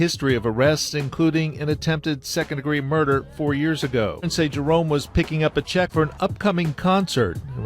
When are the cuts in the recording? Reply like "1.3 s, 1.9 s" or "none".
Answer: 4.3 s, 5.9 s

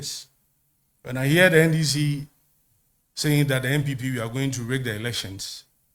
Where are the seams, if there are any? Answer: none

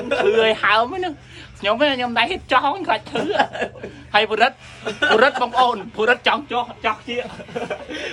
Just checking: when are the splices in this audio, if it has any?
none

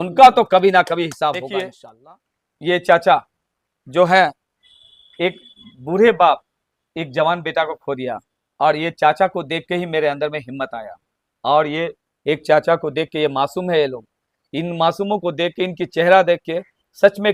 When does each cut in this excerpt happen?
1.8 s

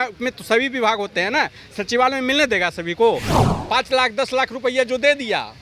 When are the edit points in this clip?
3.5 s

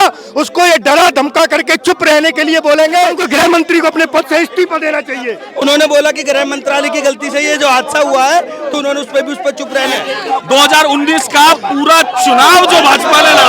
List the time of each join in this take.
3.2 s, 5.4 s, 10.1 s

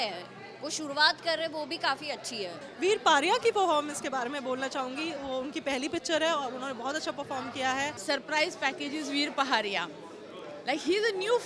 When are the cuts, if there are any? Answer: 2.6 s, 8.0 s

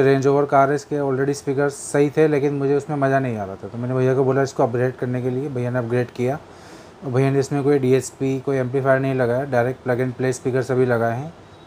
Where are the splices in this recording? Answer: none

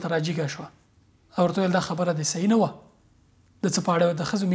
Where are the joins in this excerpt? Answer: none

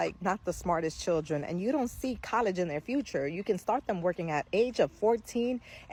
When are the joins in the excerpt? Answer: none

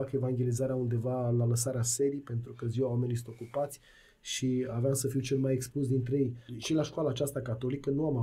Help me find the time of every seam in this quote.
6.5 s

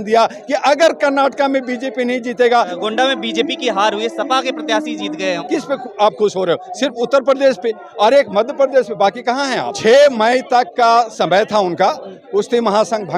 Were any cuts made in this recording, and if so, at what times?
2.7 s, 5.4 s, 9.8 s

